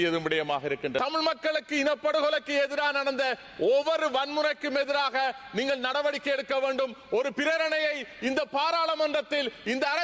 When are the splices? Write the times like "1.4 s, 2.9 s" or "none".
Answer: 1.0 s

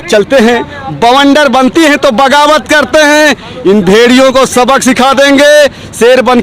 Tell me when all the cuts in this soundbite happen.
none

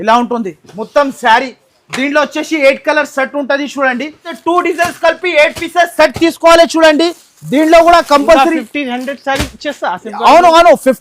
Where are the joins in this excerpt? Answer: 4.3 s

